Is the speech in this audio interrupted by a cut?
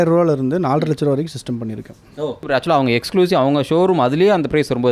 yes; 1 cut; at 2.4 s

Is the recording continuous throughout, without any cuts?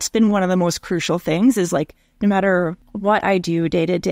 no; 1 cut; at 2.9 s

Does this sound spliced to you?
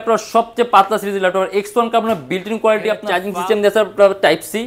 yes; 1 cut; at 3.2 s

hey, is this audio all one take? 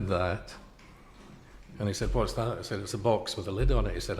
yes; 0 cuts

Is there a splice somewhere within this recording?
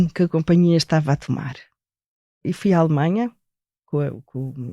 yes; 2 cuts; at 2.3 s, 3.8 s

